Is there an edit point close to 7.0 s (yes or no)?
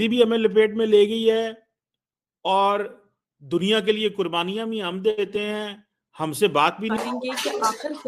yes